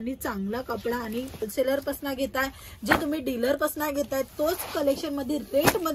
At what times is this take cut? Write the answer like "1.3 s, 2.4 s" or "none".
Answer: 1.5 s

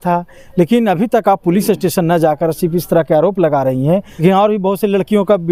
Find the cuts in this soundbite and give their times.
4.1 s

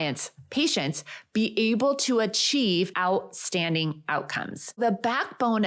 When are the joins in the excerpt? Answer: 2.9 s, 4.8 s

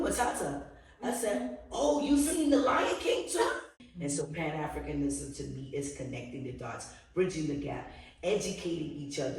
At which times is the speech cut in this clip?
3.7 s

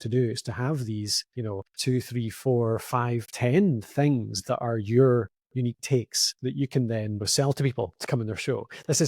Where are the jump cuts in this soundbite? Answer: 1.4 s, 6.2 s, 7.3 s

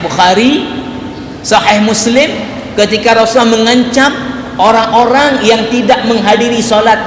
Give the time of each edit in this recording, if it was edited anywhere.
none

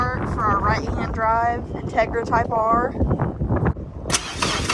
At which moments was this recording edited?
3.8 s

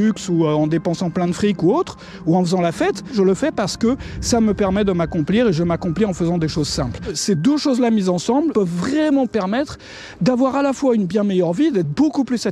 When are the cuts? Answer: 3.1 s, 7.2 s, 8.5 s

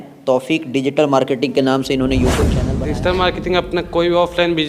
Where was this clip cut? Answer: 2.6 s

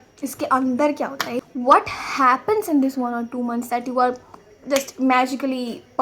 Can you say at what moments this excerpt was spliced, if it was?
1.1 s

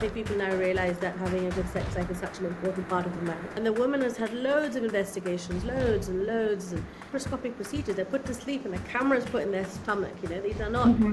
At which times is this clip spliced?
3.5 s, 7.1 s

